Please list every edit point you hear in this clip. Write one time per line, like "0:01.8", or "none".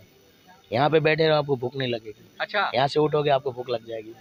none